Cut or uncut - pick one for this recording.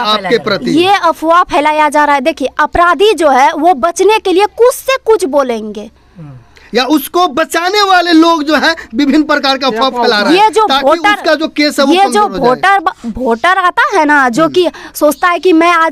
uncut